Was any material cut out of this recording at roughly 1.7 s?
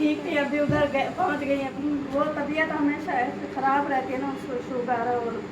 yes; 1 cut; at 1.7 s

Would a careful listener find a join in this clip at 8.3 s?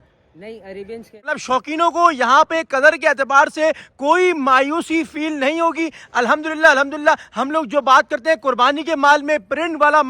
no; 1 cut; at 1.4 s

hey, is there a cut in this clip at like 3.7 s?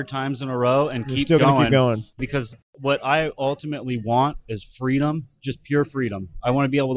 no; 1 cut; at 2.2 s

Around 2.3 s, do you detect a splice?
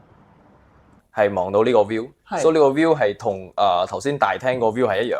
no; 1 cut; at 1.0 s

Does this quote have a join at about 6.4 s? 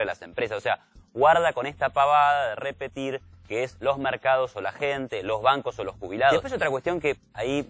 yes; 1 cut; at 6.4 s

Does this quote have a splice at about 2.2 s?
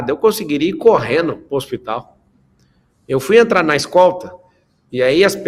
no; 0 cuts

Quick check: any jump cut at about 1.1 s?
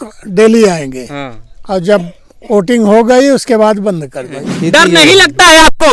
no; 1 cut; at 4.4 s

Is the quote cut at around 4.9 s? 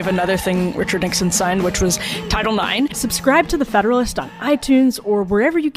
no; 1 cut; at 3.0 s

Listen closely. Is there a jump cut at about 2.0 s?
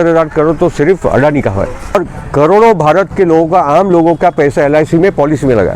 yes; 1 cut; at 2.0 s

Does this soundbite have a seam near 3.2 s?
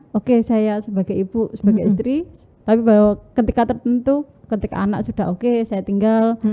no; 0 cuts

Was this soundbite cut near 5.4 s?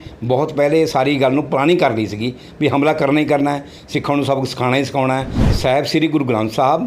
yes; 1 cut; at 5.4 s

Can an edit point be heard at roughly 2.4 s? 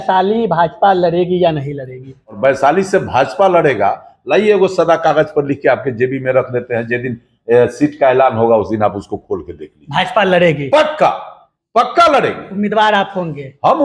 yes; 1 cut; at 2.4 s

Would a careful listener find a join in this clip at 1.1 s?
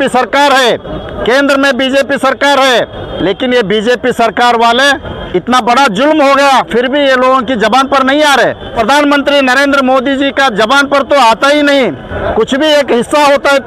yes; 5 cuts; at 1.1 s, 3.1 s, 5.1 s, 8.7 s, 12.1 s

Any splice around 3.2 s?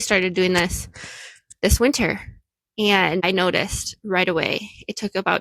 yes; 1 cut; at 3.2 s

